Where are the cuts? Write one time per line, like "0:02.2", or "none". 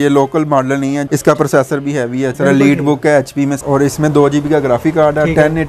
0:01.0
0:02.4
0:03.6